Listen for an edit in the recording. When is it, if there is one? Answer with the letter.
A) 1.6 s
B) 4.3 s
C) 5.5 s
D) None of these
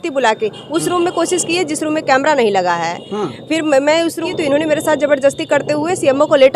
B